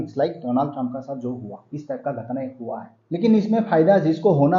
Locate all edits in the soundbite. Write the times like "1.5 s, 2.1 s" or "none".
2.9 s